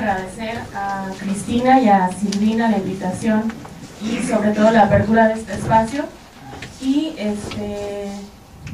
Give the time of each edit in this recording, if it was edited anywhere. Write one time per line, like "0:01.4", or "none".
0:06.1